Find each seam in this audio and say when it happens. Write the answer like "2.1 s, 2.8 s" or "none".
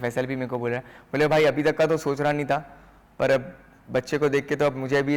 none